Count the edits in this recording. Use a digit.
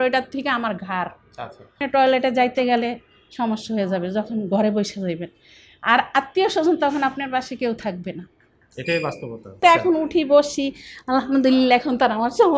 2